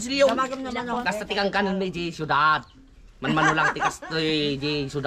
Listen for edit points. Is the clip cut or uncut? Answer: cut